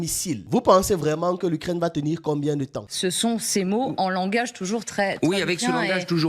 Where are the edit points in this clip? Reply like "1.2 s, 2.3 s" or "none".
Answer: 2.8 s